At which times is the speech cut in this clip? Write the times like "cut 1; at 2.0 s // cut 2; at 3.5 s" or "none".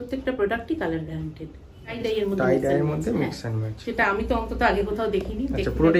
cut 1; at 2.0 s